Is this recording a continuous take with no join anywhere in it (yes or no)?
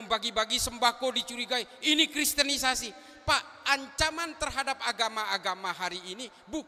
yes